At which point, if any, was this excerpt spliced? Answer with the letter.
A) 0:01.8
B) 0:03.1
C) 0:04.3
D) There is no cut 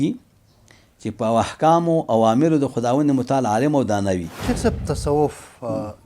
C